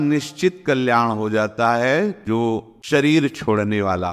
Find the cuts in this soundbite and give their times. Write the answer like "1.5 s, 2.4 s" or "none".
2.4 s